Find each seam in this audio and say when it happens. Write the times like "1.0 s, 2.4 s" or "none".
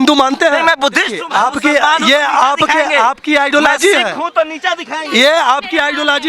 1.2 s